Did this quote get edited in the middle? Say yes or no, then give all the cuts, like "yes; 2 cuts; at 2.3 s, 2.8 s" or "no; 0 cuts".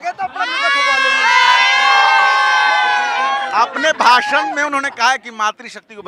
no; 0 cuts